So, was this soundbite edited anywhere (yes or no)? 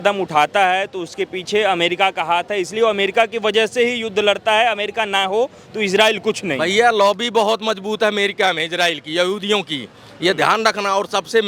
no